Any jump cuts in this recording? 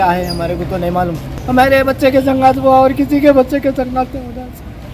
yes; 1 cut; at 1.3 s

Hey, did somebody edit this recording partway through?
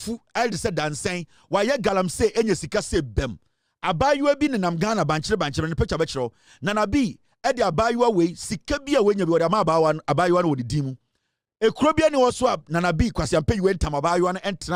no; 0 cuts

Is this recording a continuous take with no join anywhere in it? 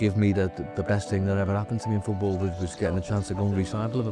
yes; 0 cuts

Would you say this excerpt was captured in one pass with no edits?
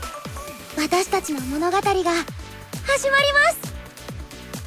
no; 1 cut; at 3.7 s

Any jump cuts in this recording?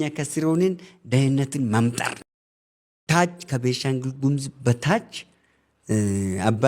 yes; 1 cut; at 2.6 s

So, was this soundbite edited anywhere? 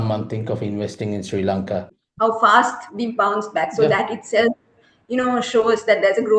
yes; 1 cut; at 2.0 s

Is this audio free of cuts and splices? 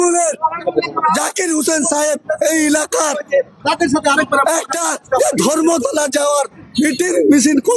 yes; 0 cuts

